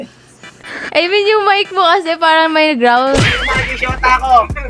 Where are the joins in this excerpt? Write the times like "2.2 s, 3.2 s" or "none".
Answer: 3.3 s